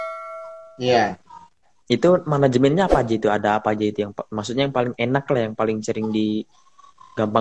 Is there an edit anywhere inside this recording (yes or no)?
no